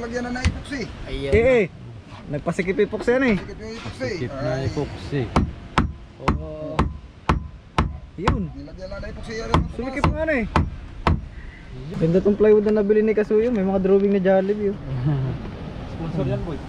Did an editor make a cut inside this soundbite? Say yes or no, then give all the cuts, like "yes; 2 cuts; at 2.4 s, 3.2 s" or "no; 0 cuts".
yes; 1 cut; at 11.9 s